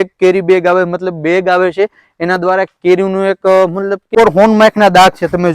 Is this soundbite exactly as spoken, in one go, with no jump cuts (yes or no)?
no